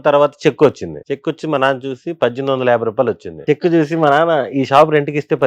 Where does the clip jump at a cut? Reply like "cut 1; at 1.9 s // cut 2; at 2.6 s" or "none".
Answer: cut 1; at 0.9 s // cut 2; at 3.4 s